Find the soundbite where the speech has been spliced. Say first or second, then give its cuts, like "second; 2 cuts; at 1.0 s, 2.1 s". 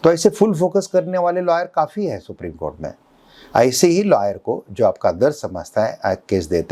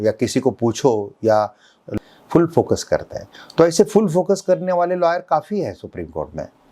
second; 1 cut; at 1.8 s